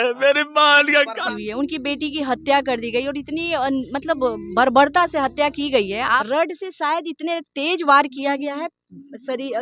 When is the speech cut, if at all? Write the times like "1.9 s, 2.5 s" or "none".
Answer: 1.2 s, 6.2 s